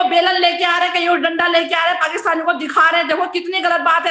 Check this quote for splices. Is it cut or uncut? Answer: uncut